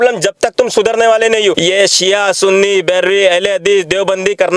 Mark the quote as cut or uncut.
cut